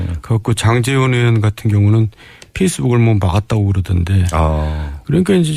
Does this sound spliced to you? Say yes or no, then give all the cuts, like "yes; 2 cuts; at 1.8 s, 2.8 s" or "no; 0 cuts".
no; 0 cuts